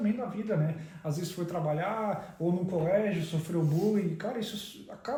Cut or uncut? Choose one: uncut